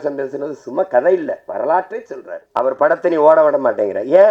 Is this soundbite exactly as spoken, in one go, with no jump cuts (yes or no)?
no